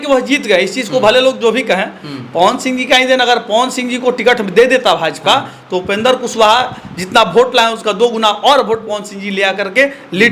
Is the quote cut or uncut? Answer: uncut